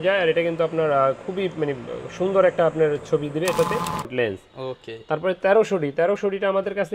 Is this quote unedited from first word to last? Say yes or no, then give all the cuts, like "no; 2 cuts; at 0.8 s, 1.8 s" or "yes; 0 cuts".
no; 1 cut; at 4.1 s